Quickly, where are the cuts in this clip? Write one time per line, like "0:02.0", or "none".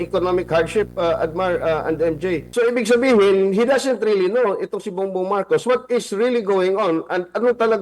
0:02.4